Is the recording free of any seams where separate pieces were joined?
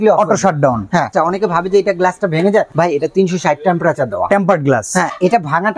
no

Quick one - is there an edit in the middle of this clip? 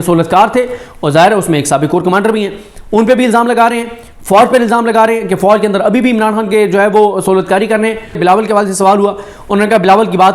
yes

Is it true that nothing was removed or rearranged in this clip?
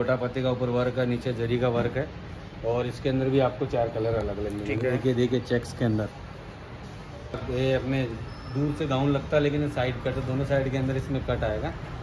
no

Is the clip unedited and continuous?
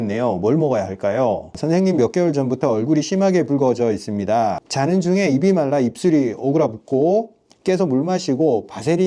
no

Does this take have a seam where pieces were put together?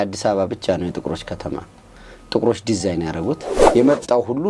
yes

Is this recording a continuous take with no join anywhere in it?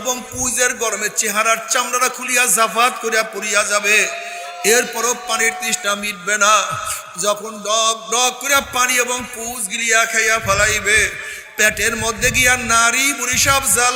yes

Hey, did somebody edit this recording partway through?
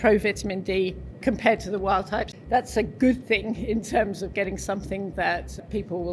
yes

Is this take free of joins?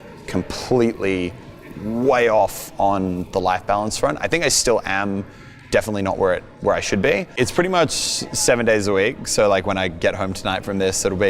no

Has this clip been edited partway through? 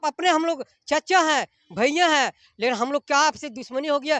no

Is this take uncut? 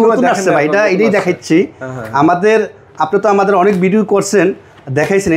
yes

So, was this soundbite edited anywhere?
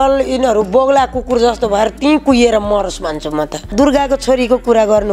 yes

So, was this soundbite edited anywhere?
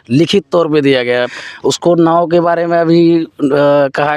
yes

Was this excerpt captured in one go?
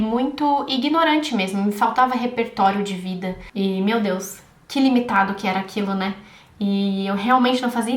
no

